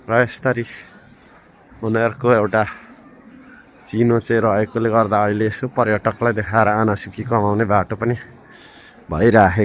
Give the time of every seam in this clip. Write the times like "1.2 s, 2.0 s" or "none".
none